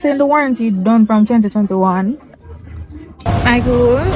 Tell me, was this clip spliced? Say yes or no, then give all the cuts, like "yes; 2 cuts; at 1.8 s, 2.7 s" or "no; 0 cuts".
yes; 1 cut; at 3.2 s